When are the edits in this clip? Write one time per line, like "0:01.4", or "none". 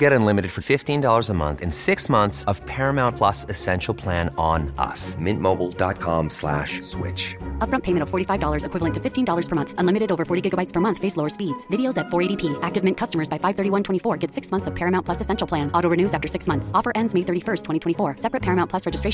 none

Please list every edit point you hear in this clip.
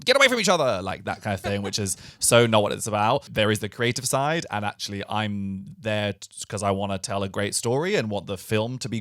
0:03.3

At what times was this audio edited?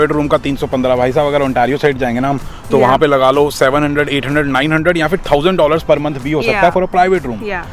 none

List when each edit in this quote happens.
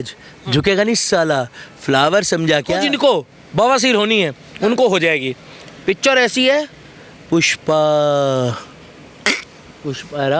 0:02.8

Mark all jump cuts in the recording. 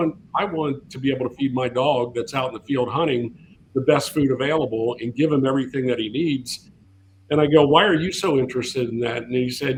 none

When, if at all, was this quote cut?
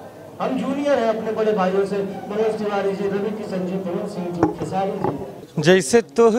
0:05.4

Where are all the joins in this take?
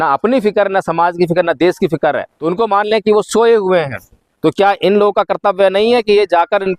0:02.3

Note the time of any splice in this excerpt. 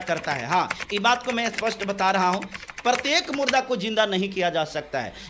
none

